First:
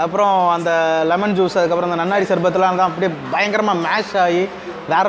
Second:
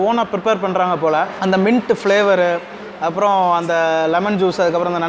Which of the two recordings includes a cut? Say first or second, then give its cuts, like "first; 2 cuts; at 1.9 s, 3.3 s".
second; 1 cut; at 1.3 s